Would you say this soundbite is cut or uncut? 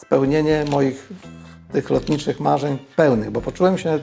uncut